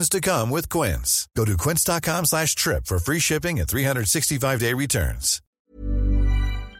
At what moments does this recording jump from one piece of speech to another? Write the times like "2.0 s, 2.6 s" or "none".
5.5 s